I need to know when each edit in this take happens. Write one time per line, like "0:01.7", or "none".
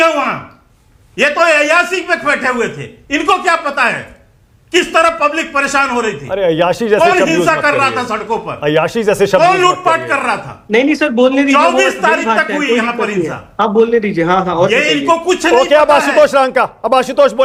none